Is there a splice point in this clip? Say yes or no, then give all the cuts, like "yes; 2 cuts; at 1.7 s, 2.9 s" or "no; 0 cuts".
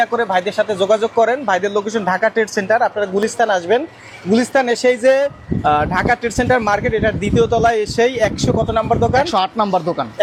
no; 0 cuts